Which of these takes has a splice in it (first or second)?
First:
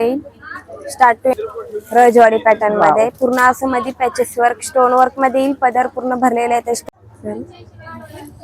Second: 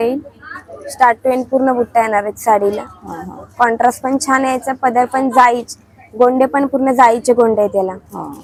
first